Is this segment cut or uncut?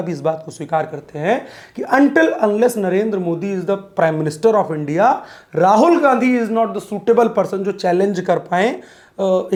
uncut